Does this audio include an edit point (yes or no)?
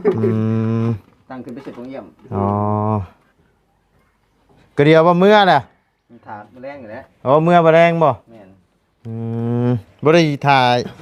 no